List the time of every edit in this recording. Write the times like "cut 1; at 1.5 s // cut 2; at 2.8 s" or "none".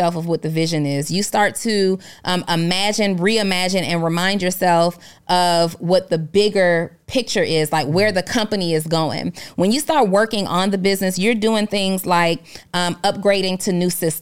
none